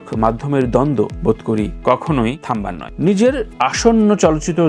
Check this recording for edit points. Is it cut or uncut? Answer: cut